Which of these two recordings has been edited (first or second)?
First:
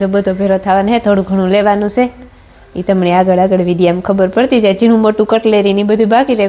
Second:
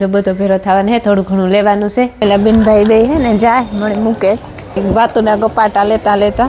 second